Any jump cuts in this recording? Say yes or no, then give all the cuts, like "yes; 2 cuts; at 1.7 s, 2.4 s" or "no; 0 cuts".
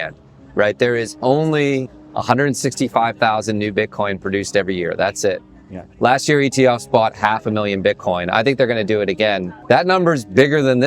yes; 1 cut; at 9.5 s